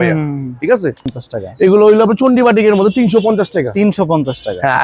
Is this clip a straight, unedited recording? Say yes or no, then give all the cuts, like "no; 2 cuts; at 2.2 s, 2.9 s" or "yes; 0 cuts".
no; 1 cut; at 1.1 s